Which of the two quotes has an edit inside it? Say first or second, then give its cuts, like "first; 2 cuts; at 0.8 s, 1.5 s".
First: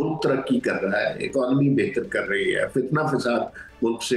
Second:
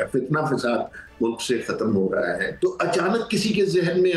second; 1 cut; at 2.5 s